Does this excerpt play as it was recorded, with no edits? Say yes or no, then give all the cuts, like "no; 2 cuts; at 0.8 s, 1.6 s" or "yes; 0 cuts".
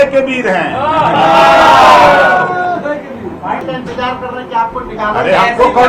no; 1 cut; at 3.6 s